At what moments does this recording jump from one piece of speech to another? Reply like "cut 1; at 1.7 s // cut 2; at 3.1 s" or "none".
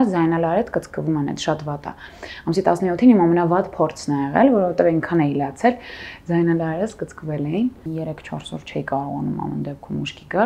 cut 1; at 7.9 s